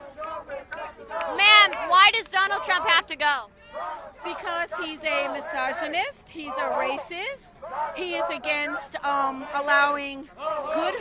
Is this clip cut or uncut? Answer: cut